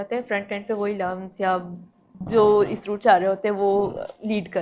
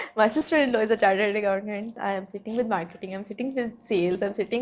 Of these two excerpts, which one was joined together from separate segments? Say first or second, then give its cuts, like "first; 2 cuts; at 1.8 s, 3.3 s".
second; 1 cut; at 2.0 s